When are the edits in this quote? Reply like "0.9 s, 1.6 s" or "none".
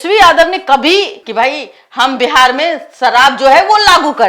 1.2 s